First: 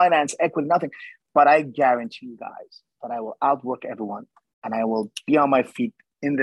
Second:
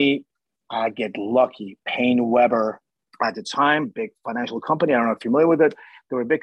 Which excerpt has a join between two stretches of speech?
second; 1 cut; at 2.8 s

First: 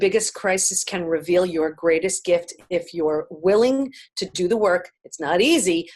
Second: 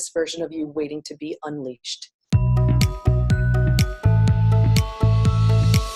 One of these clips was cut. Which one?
second; 1 cut; at 2.1 s

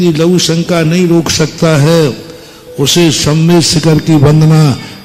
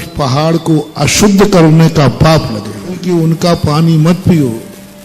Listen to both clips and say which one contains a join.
second; 1 cut; at 3.0 s

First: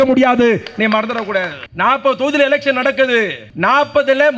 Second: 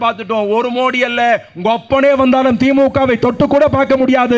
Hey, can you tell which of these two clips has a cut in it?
first; 2 cuts; at 1.6 s, 3.4 s

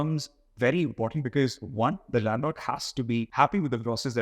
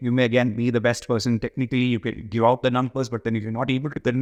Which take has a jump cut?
first; 1 cut; at 3.3 s

